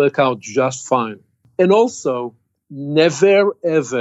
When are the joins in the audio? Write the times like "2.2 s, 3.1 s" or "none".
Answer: 1.4 s